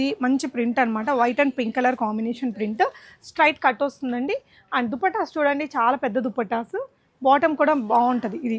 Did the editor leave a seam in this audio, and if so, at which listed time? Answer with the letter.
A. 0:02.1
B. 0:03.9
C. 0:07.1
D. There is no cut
D